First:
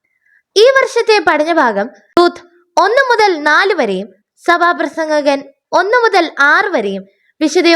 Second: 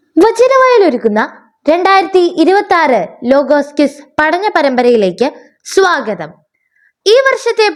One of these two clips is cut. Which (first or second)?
first